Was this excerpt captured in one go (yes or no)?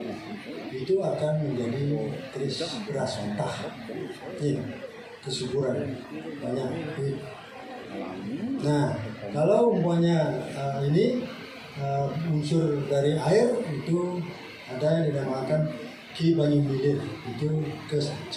yes